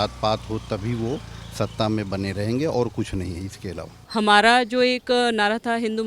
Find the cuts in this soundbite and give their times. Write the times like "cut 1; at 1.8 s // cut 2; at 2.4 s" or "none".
cut 1; at 4.0 s